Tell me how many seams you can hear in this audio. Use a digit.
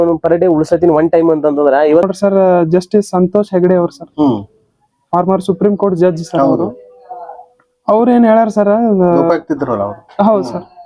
1